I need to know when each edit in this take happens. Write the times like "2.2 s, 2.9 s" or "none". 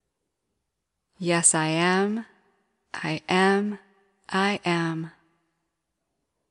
0.9 s

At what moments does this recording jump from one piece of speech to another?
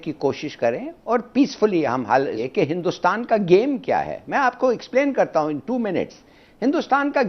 2.4 s

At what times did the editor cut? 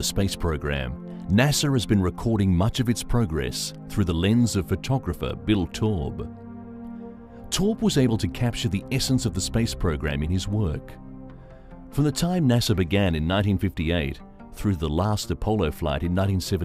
8.2 s

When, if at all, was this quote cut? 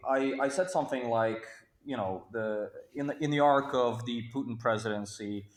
none

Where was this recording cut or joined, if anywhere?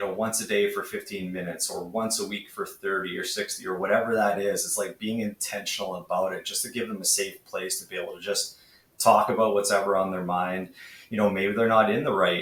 none

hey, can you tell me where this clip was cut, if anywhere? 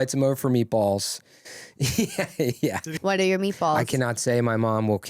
3.0 s

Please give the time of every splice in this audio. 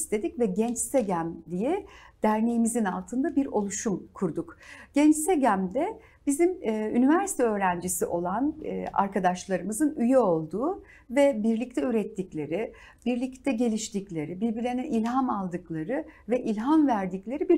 none

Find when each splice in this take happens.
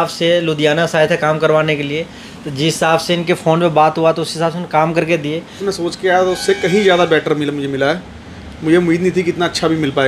5.6 s

